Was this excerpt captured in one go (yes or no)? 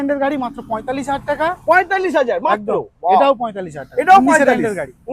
yes